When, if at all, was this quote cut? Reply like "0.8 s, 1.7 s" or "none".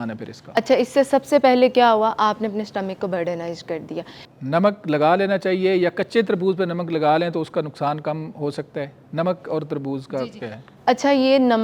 4.4 s

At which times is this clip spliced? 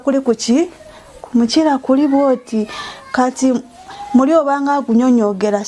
none

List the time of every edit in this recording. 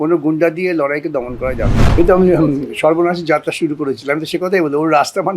2.0 s

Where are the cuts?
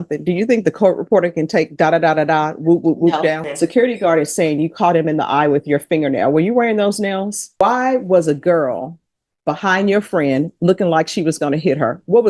3.5 s, 7.5 s

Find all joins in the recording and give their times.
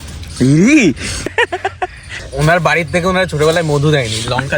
1.3 s, 2.2 s

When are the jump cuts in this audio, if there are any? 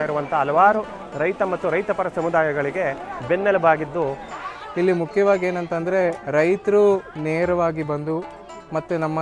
4.4 s

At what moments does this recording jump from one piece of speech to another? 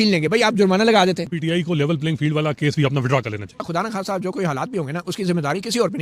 1.3 s, 3.6 s

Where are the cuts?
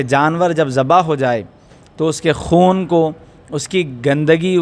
none

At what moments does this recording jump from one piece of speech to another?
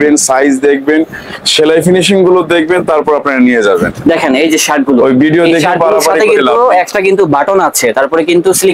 none

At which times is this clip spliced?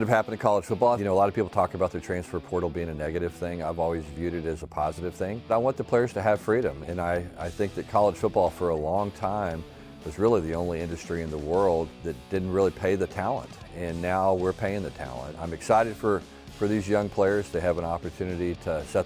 1.0 s, 5.5 s, 15.4 s

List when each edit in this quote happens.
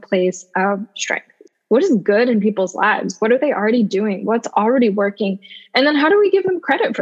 1.4 s

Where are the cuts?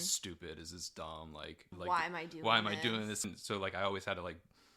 1.7 s, 3.3 s

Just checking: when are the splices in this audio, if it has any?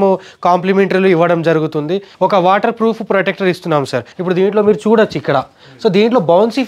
2.1 s, 4.1 s

